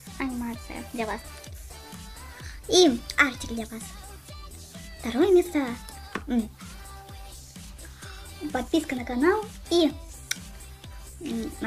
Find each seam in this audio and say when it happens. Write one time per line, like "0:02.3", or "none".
0:03.4